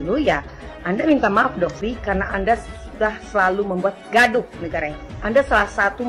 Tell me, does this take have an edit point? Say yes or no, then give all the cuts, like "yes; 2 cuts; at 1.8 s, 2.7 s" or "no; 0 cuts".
yes; 1 cut; at 1.8 s